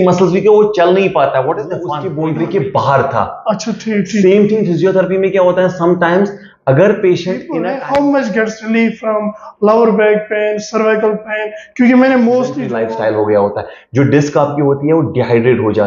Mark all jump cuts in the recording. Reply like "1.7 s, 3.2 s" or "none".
2.0 s, 7.5 s, 12.6 s